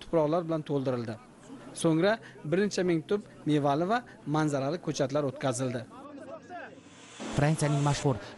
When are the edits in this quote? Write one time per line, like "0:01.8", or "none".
0:07.2